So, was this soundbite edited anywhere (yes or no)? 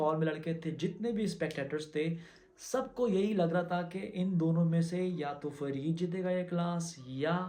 no